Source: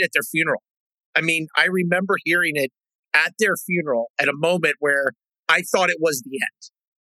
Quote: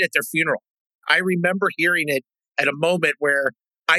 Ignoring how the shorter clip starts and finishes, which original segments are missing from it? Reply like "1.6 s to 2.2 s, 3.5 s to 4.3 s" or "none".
1.0 s to 1.5 s, 3.0 s to 4.1 s